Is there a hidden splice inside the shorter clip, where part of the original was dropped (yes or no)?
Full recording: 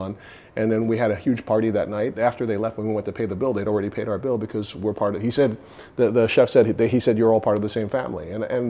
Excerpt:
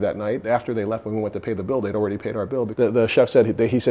yes